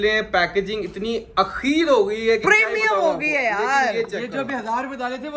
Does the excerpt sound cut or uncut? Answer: uncut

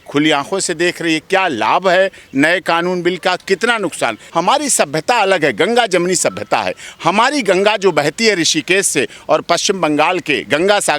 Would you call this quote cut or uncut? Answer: cut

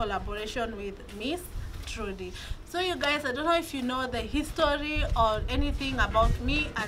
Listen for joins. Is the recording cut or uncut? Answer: uncut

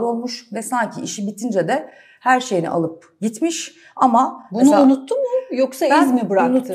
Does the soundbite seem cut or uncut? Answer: uncut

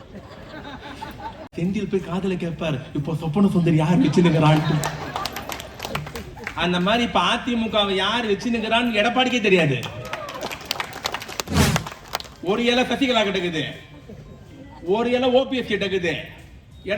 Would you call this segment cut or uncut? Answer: cut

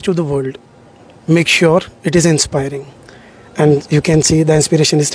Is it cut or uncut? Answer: uncut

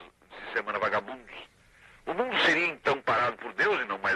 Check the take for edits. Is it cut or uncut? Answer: uncut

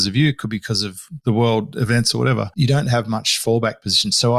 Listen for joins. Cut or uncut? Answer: cut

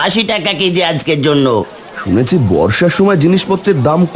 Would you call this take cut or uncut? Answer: cut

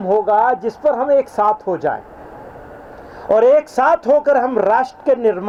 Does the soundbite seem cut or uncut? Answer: uncut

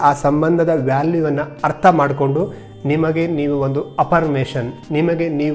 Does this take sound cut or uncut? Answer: uncut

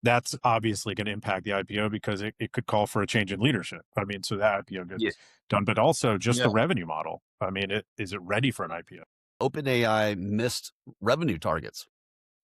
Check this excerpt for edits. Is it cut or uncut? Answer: cut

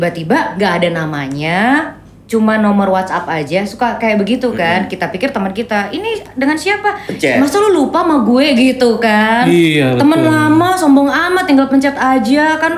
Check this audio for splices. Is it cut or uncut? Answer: uncut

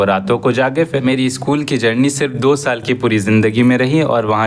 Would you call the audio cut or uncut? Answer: cut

